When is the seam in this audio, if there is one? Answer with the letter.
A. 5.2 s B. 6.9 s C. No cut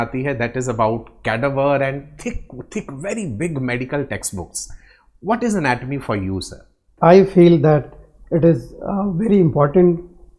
B